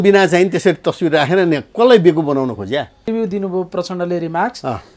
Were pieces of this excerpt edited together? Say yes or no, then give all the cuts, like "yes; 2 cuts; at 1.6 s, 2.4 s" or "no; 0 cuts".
yes; 1 cut; at 3.1 s